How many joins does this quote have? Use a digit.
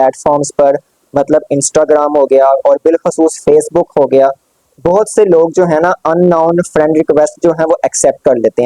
0